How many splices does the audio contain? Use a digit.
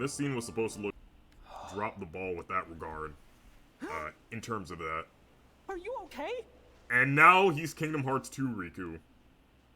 1